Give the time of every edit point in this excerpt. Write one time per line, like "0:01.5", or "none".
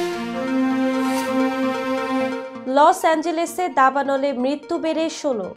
none